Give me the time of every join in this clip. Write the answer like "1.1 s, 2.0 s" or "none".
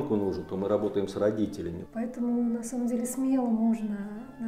1.8 s